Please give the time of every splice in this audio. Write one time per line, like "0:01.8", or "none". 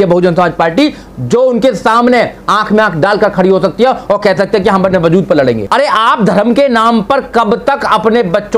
0:05.6